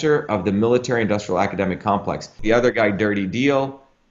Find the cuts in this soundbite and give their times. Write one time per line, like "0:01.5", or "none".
0:02.3